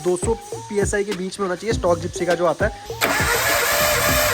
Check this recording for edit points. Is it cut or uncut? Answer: cut